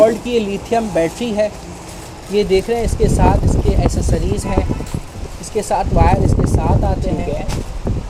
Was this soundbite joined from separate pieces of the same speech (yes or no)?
no